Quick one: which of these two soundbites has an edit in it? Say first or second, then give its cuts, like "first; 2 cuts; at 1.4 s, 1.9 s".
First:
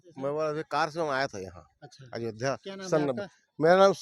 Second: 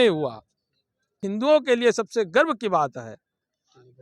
second; 1 cut; at 1.2 s